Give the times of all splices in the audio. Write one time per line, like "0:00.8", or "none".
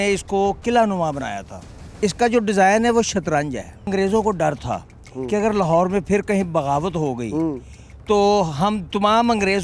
0:01.7
0:03.9